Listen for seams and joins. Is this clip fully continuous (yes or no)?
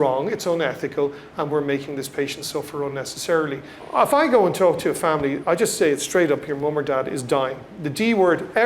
no